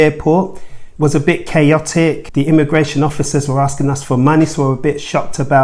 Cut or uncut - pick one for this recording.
cut